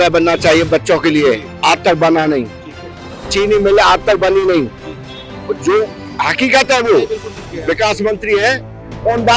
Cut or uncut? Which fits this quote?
uncut